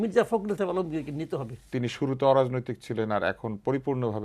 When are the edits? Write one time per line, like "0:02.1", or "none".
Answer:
0:01.7